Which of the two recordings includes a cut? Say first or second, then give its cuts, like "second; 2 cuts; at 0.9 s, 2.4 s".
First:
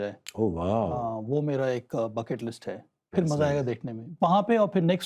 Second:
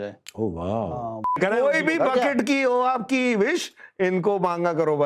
second; 1 cut; at 1.3 s